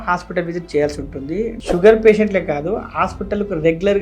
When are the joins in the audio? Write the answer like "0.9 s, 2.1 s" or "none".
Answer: 1.6 s